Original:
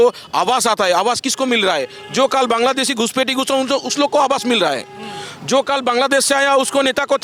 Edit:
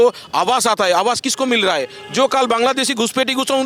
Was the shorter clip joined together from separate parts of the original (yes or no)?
no